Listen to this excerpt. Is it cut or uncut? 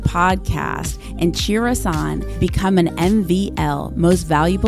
uncut